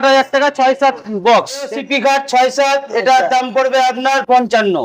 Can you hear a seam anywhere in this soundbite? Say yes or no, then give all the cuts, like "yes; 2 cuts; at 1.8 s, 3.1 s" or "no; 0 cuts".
yes; 1 cut; at 1.7 s